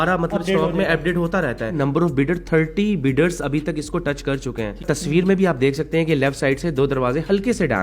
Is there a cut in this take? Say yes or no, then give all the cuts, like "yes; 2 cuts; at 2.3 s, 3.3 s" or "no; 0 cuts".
yes; 2 cuts; at 1.8 s, 4.9 s